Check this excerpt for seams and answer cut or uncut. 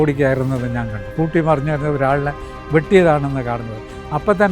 cut